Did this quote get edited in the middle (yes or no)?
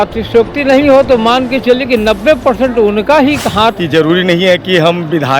yes